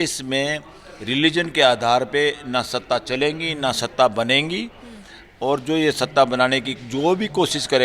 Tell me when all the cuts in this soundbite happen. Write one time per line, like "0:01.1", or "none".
none